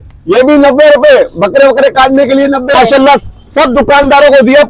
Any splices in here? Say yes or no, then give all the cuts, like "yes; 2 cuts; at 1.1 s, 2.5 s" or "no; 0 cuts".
yes; 1 cut; at 2.7 s